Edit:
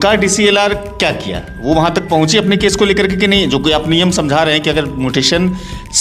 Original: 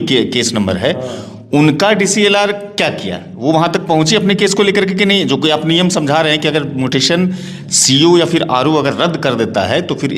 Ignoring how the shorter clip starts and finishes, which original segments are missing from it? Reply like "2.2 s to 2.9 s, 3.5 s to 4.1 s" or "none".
none